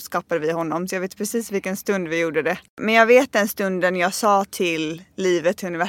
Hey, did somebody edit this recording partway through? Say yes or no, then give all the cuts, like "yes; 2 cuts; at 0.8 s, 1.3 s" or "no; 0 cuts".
yes; 1 cut; at 2.8 s